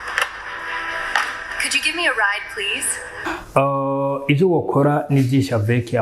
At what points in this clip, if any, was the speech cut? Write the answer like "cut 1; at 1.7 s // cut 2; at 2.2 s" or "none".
cut 1; at 3.2 s